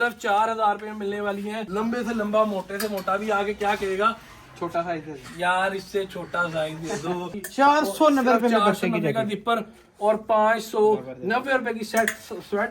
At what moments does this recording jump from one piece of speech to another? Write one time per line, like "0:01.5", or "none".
0:01.6
0:07.4